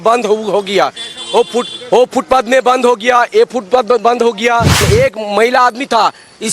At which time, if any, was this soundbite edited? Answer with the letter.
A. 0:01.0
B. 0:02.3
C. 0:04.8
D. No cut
C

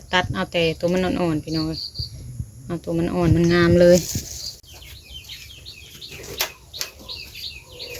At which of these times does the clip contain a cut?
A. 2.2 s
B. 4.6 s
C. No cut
B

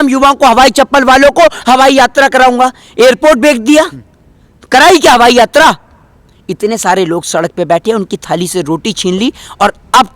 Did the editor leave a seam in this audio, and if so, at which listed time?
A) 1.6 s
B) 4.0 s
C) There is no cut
C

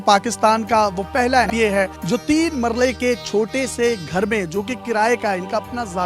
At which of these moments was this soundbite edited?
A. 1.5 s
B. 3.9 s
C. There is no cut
A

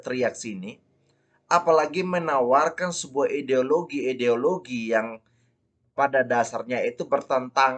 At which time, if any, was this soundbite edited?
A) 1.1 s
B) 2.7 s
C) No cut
C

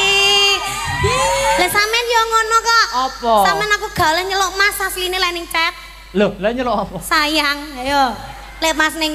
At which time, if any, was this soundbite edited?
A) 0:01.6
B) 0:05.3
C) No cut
A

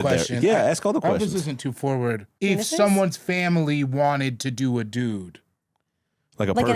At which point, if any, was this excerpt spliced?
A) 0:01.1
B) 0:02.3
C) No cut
B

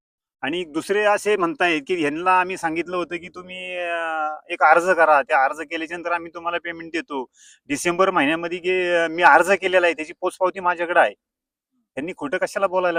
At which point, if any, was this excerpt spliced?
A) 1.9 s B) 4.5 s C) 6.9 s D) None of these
D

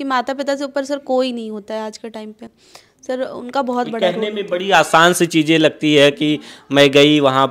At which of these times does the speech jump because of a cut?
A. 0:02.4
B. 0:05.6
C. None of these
C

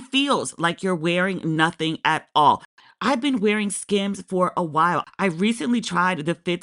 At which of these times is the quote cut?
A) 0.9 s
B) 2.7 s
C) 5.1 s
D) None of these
B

